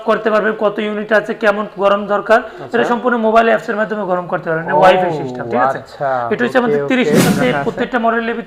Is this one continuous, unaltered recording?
no; 1 cut; at 7.3 s

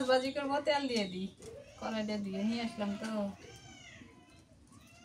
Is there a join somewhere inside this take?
no; 0 cuts

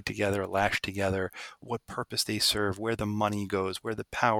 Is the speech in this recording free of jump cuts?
no; 1 cut; at 1.6 s

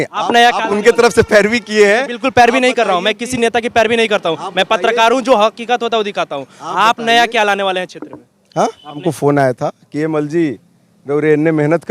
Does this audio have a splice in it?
yes; 1 cut; at 9.0 s

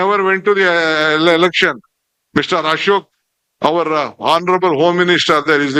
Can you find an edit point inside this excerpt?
no; 0 cuts

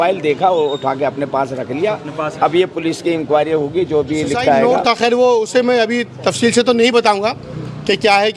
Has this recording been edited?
yes; 1 cut; at 4.6 s

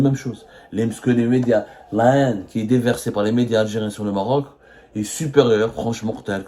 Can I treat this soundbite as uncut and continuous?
yes; 0 cuts

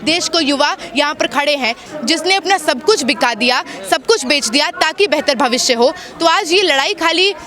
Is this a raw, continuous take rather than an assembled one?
no; 1 cut; at 1.8 s

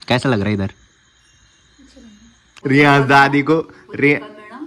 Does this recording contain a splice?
yes; 1 cut; at 2.5 s

